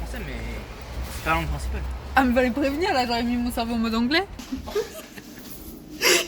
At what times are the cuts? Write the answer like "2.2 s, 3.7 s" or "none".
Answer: 4.4 s